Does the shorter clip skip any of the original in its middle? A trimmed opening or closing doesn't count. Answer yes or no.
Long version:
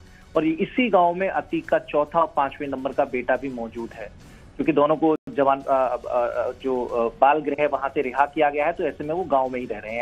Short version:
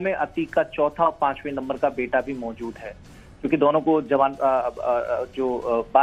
yes